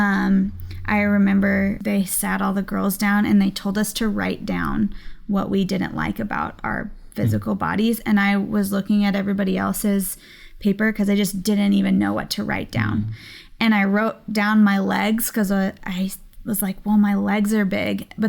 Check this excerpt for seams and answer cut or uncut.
cut